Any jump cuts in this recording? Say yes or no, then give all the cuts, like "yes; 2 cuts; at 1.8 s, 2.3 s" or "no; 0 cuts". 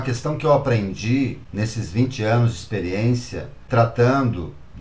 yes; 2 cuts; at 1.4 s, 3.6 s